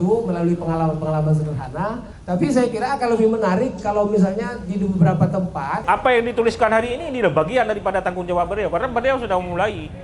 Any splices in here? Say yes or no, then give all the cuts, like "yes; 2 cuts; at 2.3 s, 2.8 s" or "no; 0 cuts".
yes; 2 cuts; at 2.1 s, 5.8 s